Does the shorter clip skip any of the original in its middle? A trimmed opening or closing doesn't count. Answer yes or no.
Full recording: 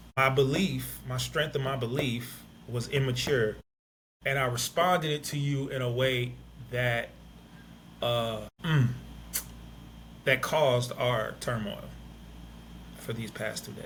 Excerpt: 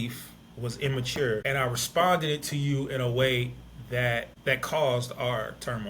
yes